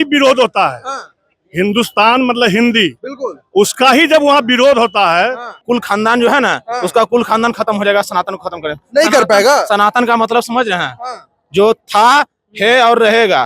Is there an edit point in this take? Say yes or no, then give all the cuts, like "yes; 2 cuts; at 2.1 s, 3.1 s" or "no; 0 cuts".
yes; 1 cut; at 5.6 s